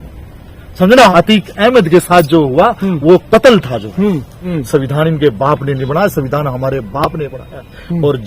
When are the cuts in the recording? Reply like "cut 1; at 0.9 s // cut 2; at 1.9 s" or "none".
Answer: cut 1; at 0.9 s // cut 2; at 4.3 s